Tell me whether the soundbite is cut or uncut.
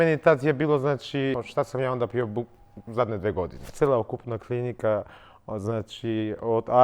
cut